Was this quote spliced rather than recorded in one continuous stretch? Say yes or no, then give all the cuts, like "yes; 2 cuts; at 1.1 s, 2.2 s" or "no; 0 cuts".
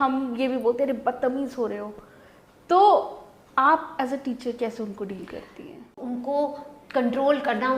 yes; 1 cut; at 5.9 s